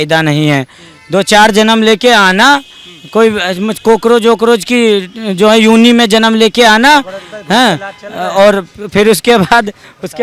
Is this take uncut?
yes; 0 cuts

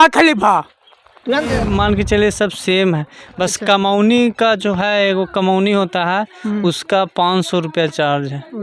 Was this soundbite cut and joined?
yes; 1 cut; at 1.6 s

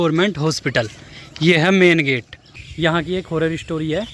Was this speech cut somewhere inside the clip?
yes; 1 cut; at 2.5 s

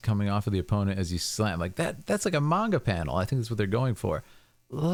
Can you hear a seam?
no; 0 cuts

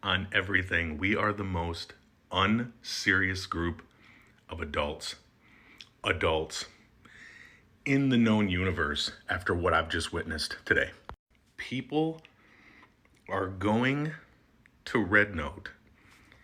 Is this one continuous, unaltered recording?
yes; 0 cuts

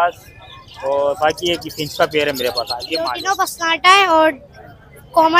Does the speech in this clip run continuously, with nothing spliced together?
no; 1 cut; at 3.2 s

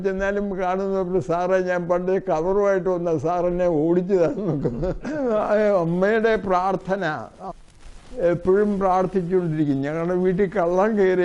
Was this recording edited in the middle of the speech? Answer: yes; 1 cut; at 5.2 s

